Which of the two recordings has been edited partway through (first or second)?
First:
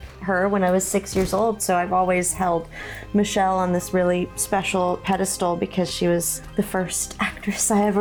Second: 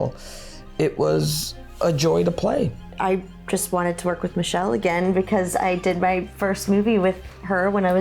second